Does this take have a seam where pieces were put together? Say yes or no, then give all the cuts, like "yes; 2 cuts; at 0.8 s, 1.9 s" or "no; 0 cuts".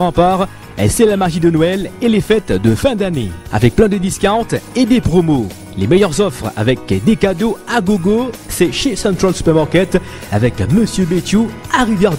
no; 0 cuts